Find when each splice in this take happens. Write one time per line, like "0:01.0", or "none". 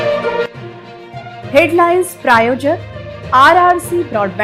none